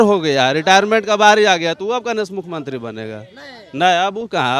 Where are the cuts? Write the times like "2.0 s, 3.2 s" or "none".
none